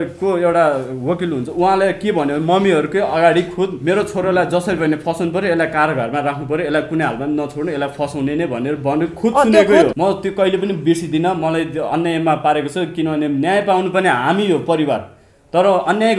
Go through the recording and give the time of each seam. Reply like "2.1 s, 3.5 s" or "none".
9.9 s